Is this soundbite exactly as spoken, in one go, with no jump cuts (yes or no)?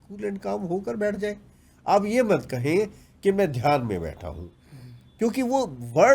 yes